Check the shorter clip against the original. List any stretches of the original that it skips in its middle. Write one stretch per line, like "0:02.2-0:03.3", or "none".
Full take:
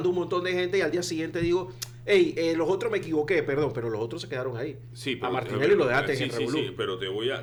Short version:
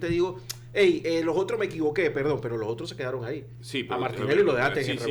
none